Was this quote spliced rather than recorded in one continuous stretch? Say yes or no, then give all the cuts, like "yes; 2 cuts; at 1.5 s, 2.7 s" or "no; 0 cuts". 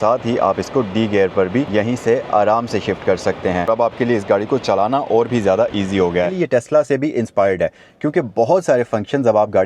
yes; 3 cuts; at 1.7 s, 3.7 s, 6.3 s